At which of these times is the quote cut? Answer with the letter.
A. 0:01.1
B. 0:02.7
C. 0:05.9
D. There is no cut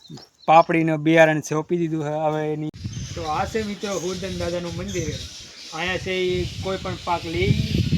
B